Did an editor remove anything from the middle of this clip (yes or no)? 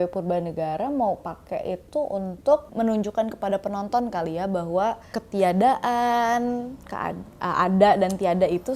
yes